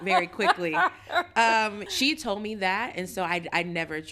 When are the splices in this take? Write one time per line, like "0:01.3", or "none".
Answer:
0:01.8

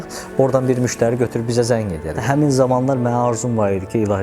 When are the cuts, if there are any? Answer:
0:02.2

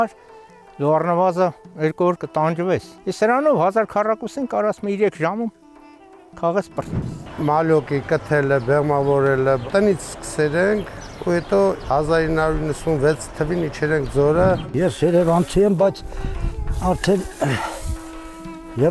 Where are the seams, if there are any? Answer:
0:02.9
0:07.2
0:14.6

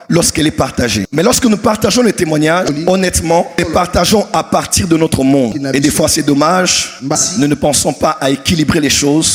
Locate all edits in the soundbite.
none

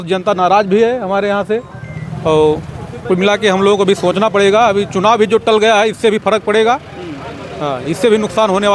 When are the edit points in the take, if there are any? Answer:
none

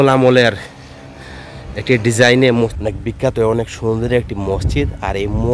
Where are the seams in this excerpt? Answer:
0:02.8

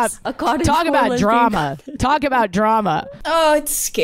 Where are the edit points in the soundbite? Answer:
0:03.1

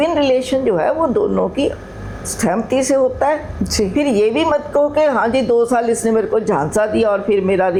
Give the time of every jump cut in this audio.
none

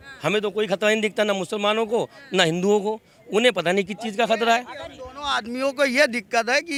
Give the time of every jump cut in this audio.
none

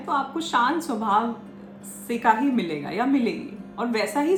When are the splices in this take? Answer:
none

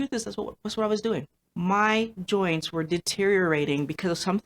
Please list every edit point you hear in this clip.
0:01.4

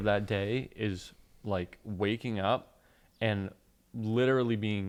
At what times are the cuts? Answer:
none

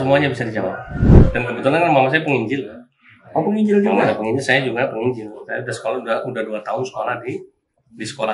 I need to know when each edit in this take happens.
0:01.2

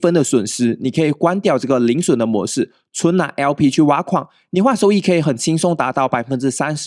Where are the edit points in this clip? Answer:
none

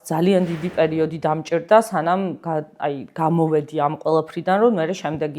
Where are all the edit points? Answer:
none

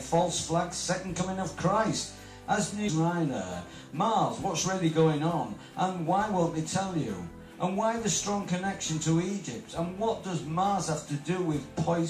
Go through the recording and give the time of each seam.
none

